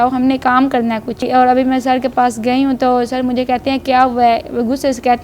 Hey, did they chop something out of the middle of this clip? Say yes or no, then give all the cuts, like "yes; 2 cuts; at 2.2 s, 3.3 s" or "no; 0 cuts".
yes; 1 cut; at 1.2 s